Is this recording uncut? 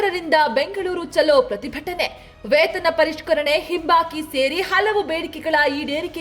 yes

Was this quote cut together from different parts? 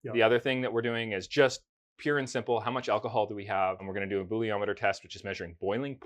yes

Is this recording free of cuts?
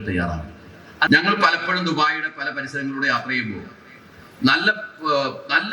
no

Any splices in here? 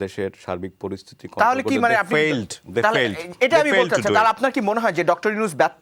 no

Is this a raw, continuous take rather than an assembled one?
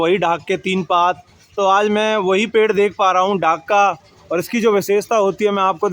yes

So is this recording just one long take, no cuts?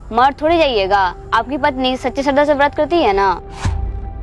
yes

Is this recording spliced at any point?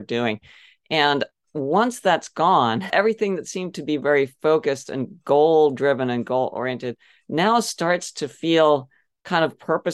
yes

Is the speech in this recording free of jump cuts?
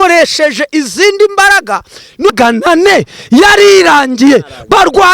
no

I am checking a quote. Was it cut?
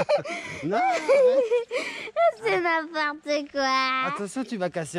no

